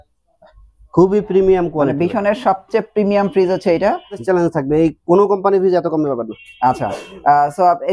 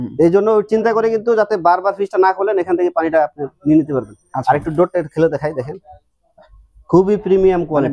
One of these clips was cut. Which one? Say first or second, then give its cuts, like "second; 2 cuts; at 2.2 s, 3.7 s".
first; 1 cut; at 4.2 s